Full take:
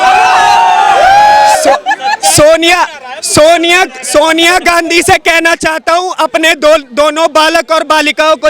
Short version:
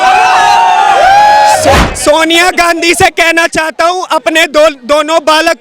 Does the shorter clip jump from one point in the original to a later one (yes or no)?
yes